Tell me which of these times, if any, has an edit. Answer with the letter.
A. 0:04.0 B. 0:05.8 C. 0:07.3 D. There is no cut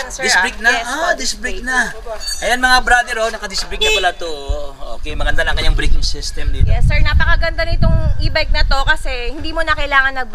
D